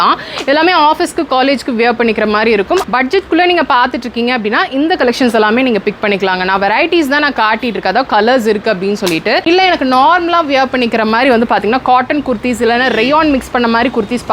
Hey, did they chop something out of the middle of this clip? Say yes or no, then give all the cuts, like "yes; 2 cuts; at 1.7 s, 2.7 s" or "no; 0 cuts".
yes; 2 cuts; at 2.9 s, 9.4 s